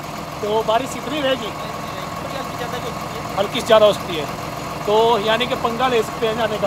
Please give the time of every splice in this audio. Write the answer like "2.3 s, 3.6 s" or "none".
none